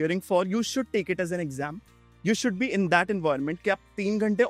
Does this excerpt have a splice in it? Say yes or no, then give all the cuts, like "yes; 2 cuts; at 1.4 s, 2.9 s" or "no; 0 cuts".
no; 0 cuts